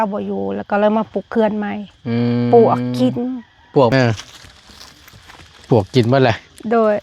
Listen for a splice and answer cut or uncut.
cut